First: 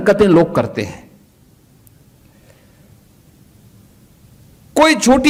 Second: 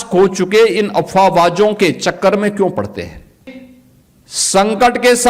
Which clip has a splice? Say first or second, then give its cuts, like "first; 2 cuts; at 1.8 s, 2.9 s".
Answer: second; 1 cut; at 3.6 s